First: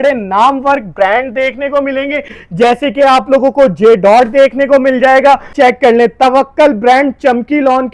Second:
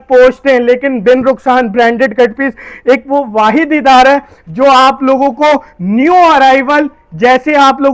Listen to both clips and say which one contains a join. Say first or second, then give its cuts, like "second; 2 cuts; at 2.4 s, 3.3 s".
first; 1 cut; at 5.5 s